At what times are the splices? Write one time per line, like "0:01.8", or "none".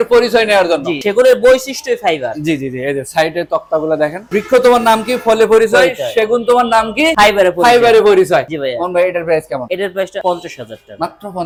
none